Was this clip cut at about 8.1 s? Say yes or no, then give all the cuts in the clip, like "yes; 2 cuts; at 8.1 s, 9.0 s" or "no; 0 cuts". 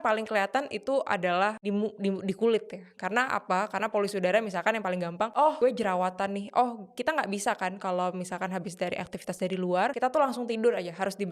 no; 3 cuts; at 1.6 s, 5.4 s, 9.9 s